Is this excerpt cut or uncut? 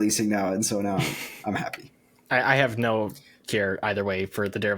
uncut